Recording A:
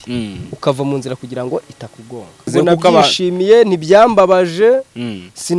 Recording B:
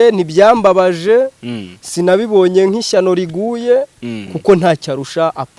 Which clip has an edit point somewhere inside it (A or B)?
A